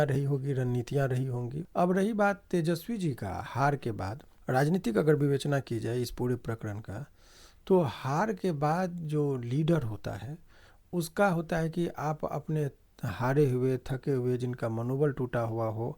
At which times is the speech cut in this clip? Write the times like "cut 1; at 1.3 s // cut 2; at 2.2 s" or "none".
cut 1; at 1.6 s // cut 2; at 4.3 s